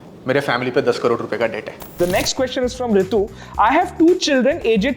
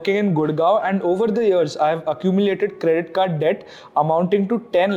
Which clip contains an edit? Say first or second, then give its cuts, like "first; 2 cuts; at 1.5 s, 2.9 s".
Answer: first; 1 cut; at 1.9 s